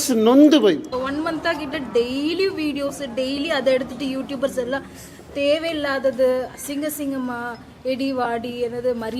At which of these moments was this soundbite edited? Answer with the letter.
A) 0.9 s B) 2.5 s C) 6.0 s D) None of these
A